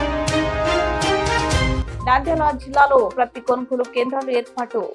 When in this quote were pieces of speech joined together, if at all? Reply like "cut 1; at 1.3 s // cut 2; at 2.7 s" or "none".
cut 1; at 1.8 s